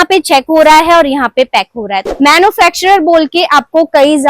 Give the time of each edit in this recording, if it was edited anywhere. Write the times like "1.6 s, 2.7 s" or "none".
2.0 s